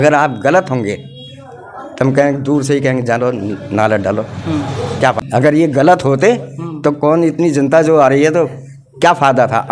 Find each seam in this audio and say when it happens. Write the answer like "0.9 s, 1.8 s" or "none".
5.2 s